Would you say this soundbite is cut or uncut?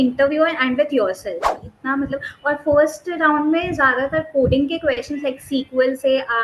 cut